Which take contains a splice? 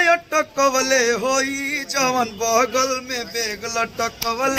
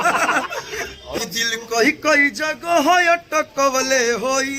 second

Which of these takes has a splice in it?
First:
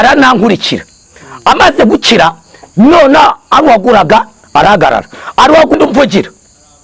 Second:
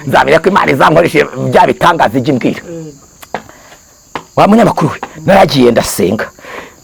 first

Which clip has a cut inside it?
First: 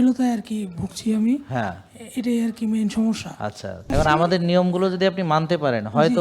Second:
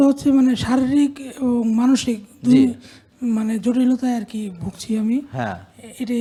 first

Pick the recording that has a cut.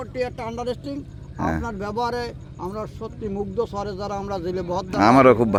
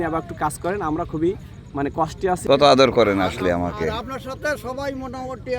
second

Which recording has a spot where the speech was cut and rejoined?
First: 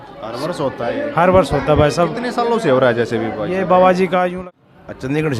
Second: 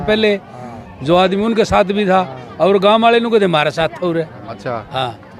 first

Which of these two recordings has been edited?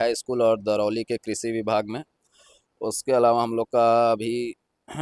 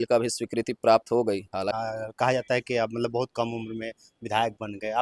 second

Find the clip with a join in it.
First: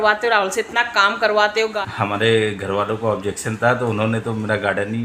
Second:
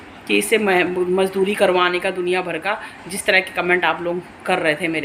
first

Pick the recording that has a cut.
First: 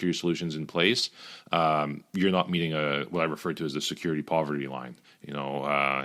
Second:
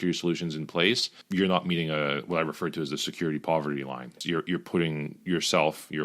second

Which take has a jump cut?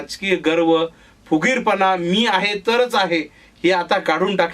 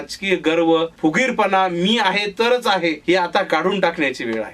second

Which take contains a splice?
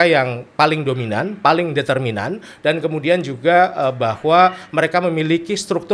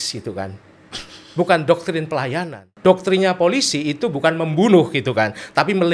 second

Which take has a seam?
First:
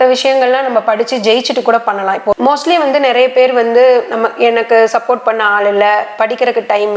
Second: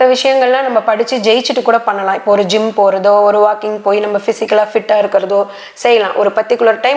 first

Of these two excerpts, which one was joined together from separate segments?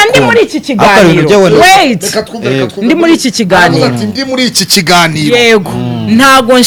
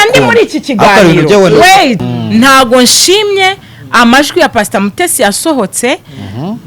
second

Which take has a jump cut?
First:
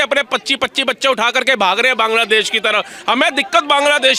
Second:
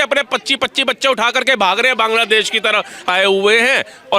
second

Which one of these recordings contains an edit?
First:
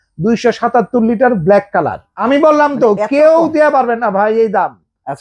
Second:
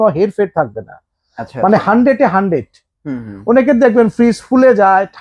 first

